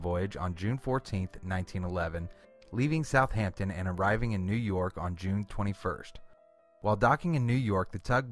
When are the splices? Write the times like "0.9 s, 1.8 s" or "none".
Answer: 6.9 s